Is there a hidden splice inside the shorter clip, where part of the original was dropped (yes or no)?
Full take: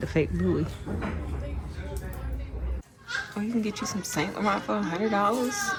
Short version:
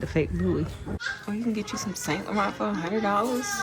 yes